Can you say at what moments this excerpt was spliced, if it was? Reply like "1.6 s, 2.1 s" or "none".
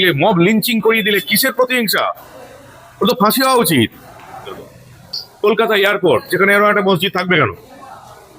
4.7 s